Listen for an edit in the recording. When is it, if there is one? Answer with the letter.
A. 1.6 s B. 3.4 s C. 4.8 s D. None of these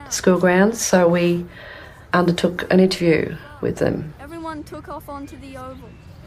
C